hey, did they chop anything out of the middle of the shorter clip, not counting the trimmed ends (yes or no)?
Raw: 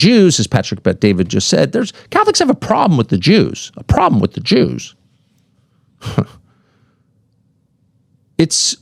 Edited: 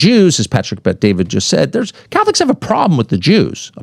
no